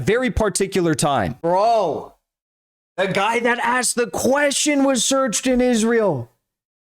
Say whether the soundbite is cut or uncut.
cut